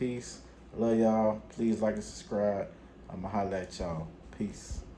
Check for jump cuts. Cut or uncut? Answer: uncut